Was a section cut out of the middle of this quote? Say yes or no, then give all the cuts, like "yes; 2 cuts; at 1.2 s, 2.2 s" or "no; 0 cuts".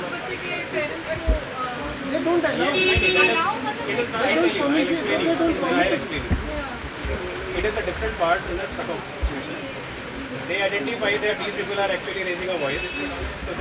no; 0 cuts